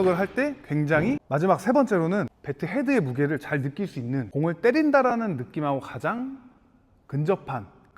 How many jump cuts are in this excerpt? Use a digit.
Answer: 3